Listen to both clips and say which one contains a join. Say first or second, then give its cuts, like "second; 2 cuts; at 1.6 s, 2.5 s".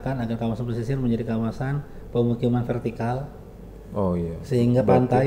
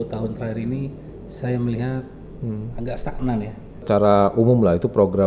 second; 1 cut; at 3.8 s